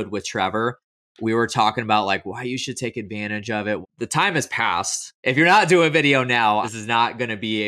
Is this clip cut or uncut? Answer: cut